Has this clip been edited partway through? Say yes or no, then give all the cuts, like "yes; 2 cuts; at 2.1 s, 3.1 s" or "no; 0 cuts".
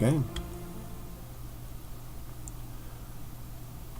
yes; 1 cut; at 2.8 s